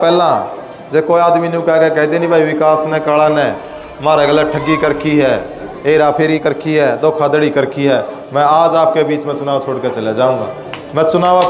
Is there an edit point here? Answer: no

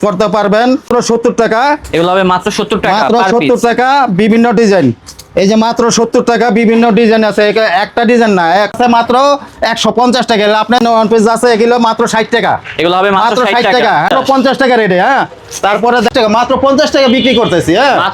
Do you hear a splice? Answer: yes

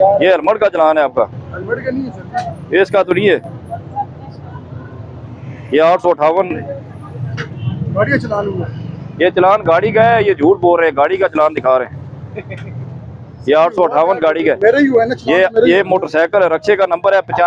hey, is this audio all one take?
yes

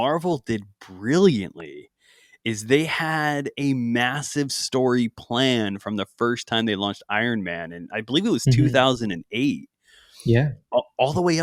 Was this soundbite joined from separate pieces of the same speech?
no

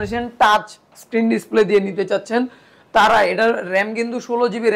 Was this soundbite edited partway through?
no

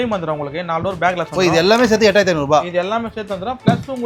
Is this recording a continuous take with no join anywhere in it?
yes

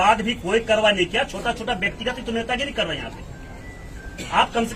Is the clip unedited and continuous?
yes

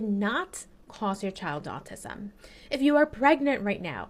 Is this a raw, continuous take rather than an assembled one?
yes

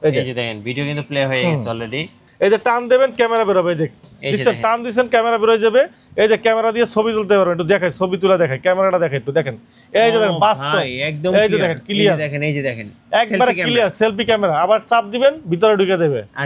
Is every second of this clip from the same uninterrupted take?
no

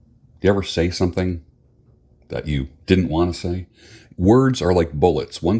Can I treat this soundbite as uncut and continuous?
yes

